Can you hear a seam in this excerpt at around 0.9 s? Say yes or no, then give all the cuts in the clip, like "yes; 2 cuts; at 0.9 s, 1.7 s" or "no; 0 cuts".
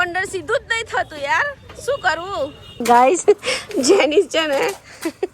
no; 1 cut; at 2.7 s